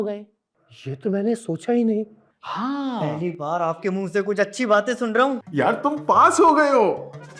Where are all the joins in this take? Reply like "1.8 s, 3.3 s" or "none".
5.4 s